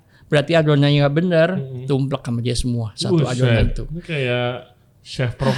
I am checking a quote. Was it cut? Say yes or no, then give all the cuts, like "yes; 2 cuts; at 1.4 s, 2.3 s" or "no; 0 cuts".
no; 0 cuts